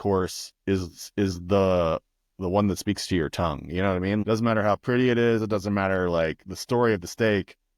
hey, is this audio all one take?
no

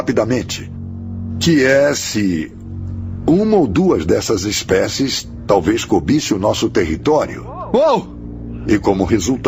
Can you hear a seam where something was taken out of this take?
no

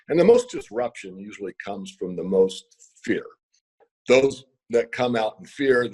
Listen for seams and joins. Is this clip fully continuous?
yes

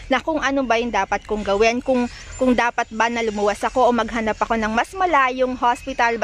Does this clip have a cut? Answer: no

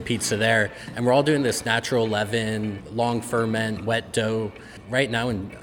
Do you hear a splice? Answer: yes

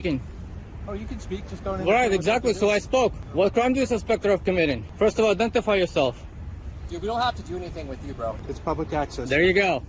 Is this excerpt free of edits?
no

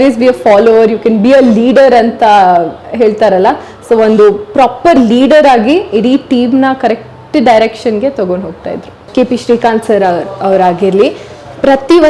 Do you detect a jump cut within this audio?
yes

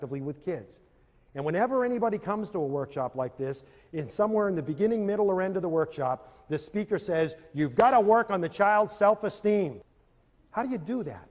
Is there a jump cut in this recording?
no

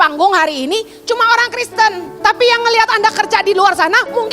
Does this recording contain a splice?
yes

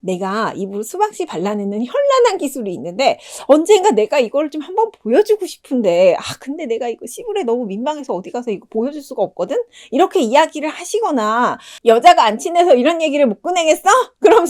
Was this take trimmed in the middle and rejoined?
yes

